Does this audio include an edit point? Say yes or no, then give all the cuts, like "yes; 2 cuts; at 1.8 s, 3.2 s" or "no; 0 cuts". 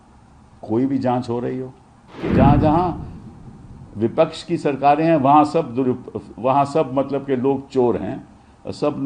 yes; 1 cut; at 2.2 s